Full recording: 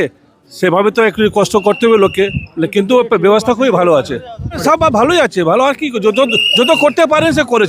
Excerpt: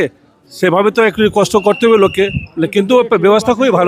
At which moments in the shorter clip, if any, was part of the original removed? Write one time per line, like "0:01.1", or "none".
none